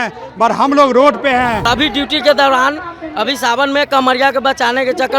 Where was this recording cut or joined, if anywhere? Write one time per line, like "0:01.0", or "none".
0:01.7